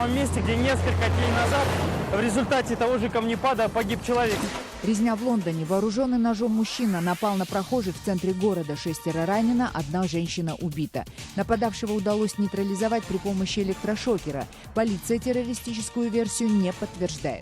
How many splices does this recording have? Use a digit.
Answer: 1